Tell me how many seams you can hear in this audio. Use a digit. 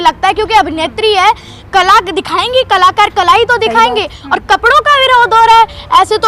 0